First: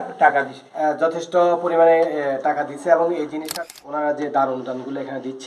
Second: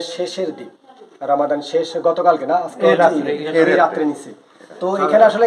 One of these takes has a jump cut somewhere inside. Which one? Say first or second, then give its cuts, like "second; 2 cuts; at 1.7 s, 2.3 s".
first; 1 cut; at 3.5 s